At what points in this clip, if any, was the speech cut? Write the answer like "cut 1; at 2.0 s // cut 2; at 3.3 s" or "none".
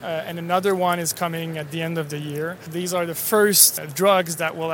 cut 1; at 2.6 s // cut 2; at 3.7 s